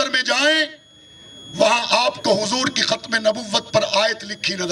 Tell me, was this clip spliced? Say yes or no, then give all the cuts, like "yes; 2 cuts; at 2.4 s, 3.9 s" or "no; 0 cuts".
no; 0 cuts